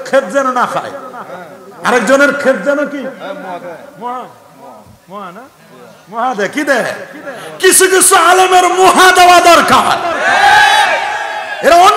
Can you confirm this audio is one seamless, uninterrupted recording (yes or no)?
yes